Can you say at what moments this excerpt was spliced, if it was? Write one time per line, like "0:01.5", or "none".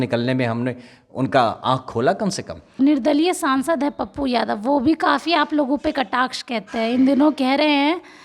0:02.7

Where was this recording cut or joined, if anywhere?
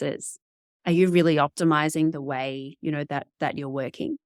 none

